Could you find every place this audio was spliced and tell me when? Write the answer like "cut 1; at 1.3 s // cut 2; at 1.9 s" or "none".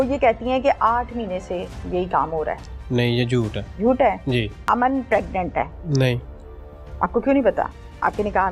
cut 1; at 3.6 s // cut 2; at 4.6 s // cut 3; at 5.8 s